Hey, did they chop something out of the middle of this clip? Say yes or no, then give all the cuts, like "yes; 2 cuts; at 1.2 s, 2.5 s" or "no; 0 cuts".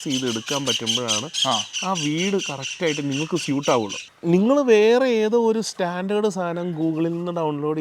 yes; 1 cut; at 4.1 s